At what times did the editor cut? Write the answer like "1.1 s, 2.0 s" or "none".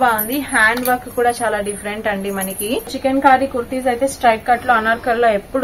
2.9 s